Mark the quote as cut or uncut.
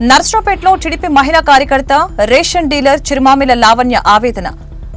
uncut